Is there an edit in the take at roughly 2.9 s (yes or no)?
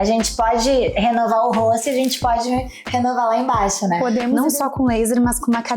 no